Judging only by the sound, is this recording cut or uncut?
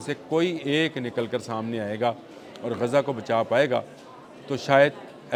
uncut